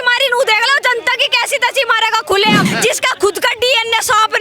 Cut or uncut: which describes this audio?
cut